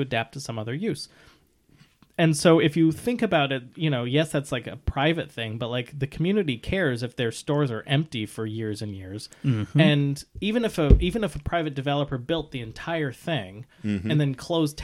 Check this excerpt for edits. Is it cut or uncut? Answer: uncut